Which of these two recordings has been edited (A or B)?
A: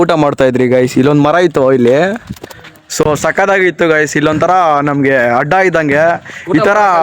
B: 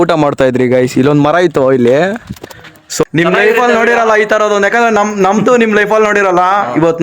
B